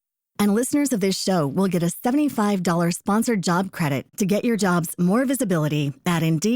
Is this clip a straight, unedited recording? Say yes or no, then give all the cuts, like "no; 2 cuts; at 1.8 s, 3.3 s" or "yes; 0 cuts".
yes; 0 cuts